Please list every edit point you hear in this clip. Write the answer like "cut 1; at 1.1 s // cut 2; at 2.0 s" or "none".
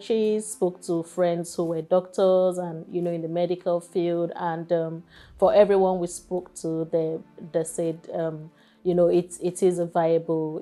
none